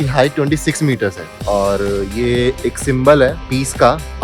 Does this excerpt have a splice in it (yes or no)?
yes